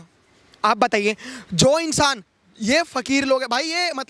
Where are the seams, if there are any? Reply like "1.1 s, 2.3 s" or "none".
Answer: none